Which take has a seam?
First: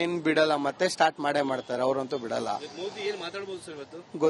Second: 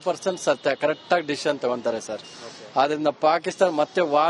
second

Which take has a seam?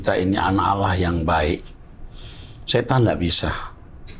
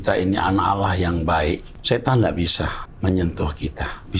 second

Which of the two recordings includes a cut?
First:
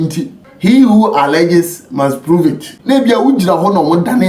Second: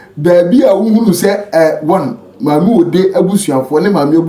first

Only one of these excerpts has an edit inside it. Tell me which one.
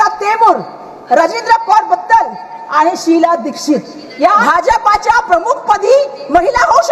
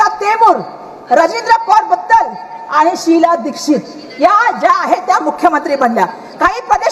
first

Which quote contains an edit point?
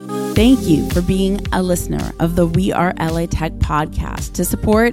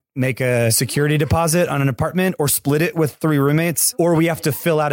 second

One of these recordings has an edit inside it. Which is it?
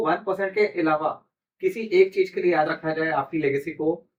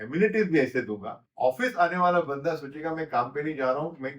second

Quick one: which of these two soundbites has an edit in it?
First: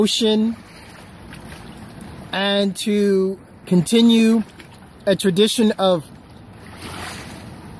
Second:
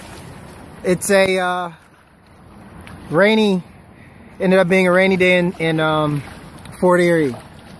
first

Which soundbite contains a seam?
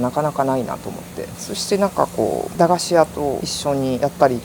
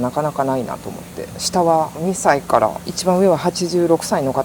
second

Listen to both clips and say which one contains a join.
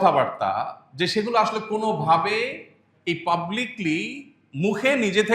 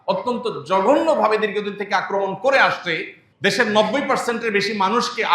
second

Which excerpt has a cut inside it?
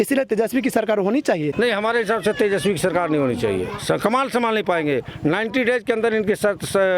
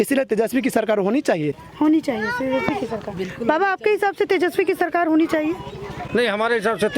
first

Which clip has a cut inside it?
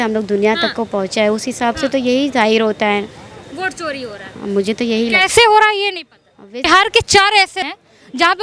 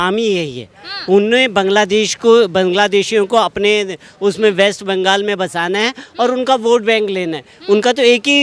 first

